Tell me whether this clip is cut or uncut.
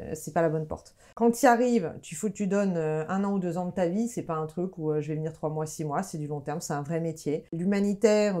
cut